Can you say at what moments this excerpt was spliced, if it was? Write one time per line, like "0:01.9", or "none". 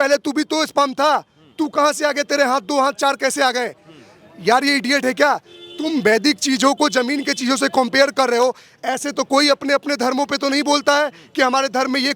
none